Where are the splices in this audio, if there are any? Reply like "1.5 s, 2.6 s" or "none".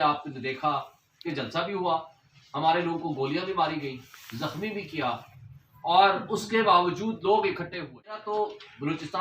8.2 s